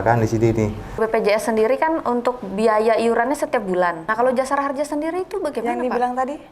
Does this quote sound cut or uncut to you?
cut